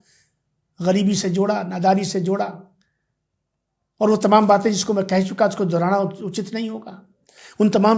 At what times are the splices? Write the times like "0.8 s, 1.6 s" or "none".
none